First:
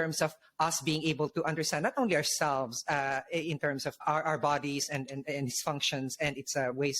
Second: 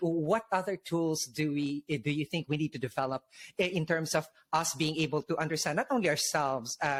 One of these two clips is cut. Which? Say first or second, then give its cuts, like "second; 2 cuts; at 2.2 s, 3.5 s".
first; 1 cut; at 4.0 s